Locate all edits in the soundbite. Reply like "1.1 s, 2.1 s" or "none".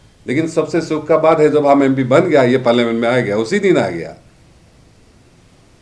none